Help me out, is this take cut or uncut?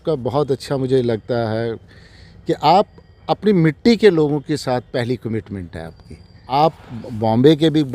cut